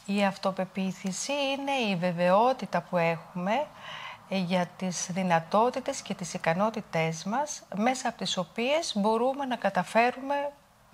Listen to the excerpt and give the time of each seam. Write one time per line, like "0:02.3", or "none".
none